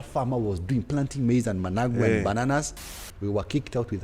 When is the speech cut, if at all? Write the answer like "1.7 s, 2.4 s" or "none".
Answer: 2.8 s